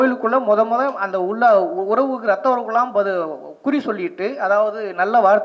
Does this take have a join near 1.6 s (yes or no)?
no